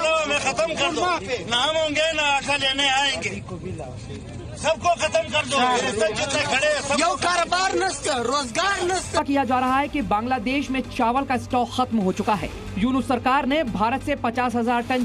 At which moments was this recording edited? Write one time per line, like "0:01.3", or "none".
none